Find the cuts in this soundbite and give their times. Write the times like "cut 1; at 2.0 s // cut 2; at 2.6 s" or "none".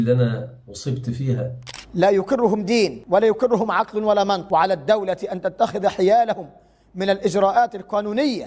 cut 1; at 1.6 s // cut 2; at 3.0 s // cut 3; at 4.4 s